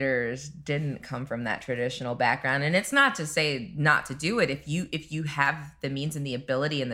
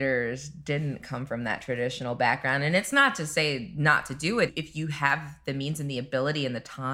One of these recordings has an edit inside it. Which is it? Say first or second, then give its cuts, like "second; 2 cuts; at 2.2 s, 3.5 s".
second; 1 cut; at 4.5 s